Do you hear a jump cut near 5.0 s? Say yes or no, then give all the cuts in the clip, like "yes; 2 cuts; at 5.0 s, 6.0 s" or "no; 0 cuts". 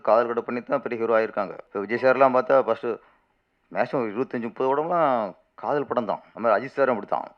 no; 2 cuts; at 1.6 s, 6.3 s